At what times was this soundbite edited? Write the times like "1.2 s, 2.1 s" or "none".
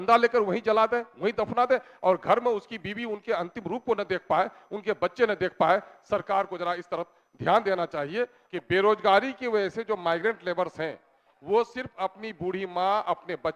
8.4 s